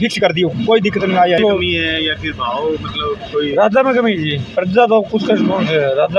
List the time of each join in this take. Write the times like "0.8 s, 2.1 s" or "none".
1.4 s

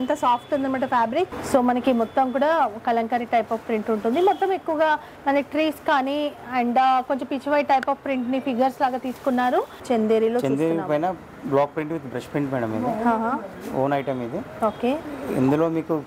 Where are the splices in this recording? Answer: 1.4 s, 9.8 s

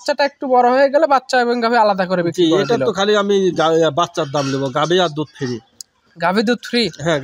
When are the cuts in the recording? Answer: none

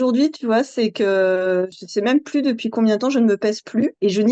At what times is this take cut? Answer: 1.8 s

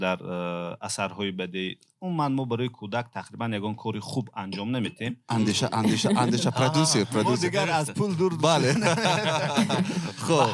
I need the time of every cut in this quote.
5.2 s

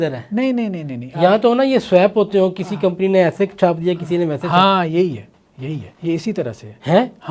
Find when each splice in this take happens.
5.9 s

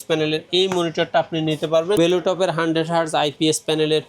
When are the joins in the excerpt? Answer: 2.0 s

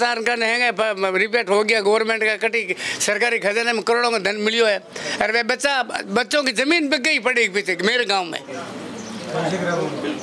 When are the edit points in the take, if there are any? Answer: none

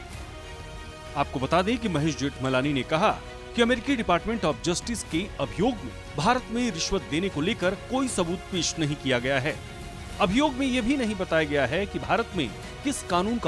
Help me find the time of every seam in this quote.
1.0 s

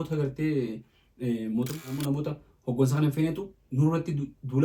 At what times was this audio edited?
1.8 s

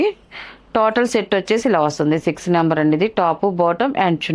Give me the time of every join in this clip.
none

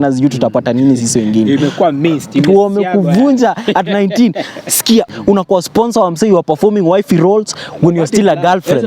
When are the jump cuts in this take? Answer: 5.0 s

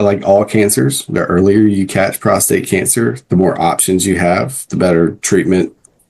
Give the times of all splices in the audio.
none

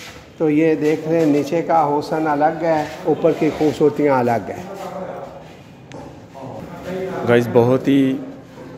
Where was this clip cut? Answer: 6.6 s

